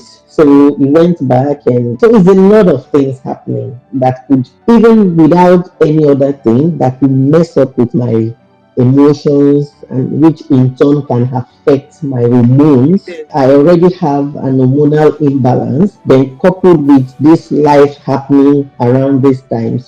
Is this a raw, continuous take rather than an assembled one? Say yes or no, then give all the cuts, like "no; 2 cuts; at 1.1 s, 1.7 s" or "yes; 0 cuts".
no; 4 cuts; at 2.0 s, 4.5 s, 13.3 s, 16.0 s